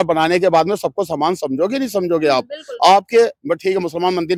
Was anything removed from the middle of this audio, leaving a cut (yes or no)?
no